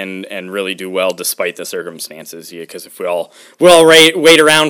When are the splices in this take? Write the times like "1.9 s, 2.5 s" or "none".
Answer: none